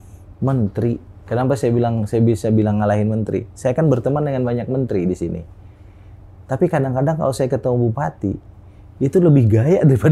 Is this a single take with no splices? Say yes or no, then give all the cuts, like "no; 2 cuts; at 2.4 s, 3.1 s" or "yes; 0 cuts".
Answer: yes; 0 cuts